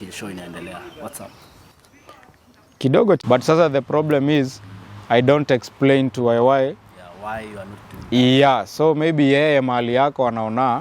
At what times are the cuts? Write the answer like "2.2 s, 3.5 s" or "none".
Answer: 3.2 s

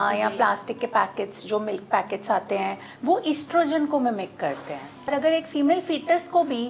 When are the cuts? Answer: 2.9 s, 5.1 s

